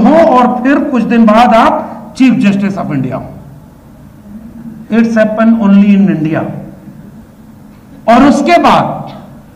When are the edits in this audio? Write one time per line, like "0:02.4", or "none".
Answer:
none